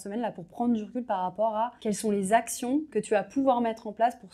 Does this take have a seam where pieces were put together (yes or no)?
yes